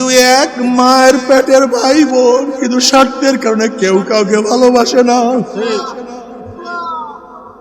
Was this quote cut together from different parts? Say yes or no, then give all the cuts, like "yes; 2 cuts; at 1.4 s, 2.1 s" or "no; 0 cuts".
yes; 1 cut; at 6.6 s